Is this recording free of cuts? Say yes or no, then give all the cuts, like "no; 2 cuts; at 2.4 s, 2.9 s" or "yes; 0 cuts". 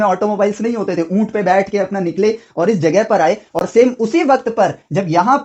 yes; 0 cuts